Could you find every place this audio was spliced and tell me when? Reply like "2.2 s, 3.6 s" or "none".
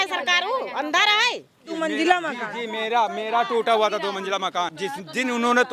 1.7 s, 4.8 s